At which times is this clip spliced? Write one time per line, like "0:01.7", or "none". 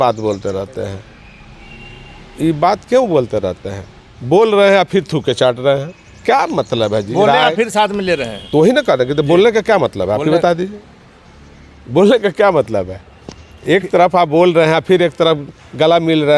none

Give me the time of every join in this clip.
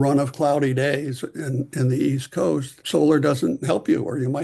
none

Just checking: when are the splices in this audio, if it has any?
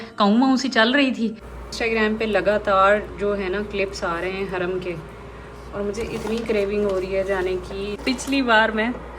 0:01.5
0:08.0

